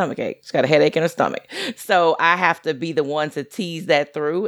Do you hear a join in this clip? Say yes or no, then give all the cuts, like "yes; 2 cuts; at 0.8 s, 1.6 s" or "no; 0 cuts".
no; 0 cuts